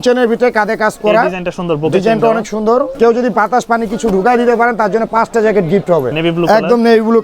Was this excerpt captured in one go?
no; 2 cuts; at 2.9 s, 6.1 s

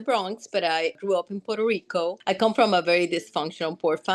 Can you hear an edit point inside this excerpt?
yes; 2 cuts; at 1.0 s, 2.2 s

